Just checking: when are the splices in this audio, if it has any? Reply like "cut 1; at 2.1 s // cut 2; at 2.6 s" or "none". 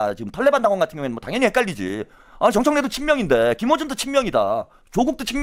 none